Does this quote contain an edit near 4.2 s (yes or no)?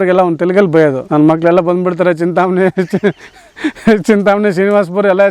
no